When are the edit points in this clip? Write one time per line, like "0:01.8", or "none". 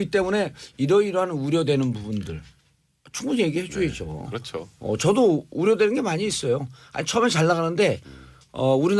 0:04.8